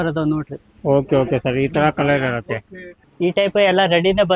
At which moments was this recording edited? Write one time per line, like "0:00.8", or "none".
0:03.0